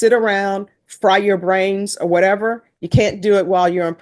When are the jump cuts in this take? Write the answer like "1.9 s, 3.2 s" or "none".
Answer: none

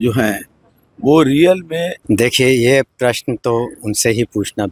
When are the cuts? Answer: 1.9 s

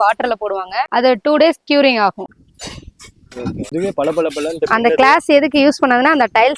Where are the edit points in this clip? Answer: 2.2 s, 3.7 s

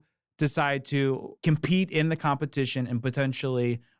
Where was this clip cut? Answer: 1.3 s

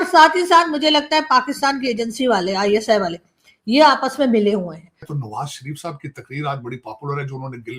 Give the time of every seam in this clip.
5.1 s

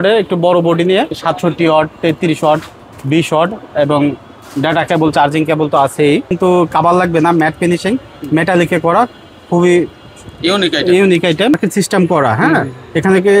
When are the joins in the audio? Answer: 1.2 s, 6.3 s, 11.5 s

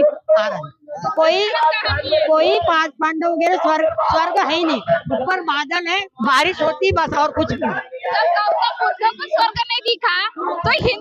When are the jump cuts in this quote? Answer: none

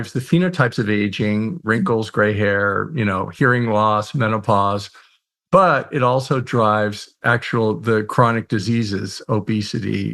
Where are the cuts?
none

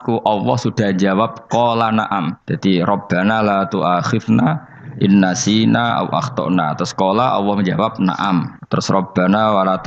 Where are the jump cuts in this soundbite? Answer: 2.4 s, 8.6 s

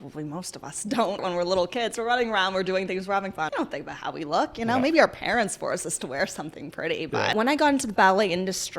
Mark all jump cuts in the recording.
1.2 s, 3.5 s, 7.3 s

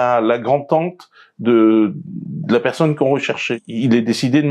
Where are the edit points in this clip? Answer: 3.6 s

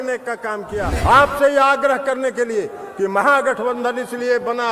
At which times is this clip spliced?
0.9 s

